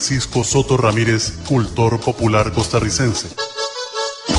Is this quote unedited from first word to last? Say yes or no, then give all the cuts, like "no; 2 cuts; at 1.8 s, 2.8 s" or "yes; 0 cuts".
no; 1 cut; at 3.3 s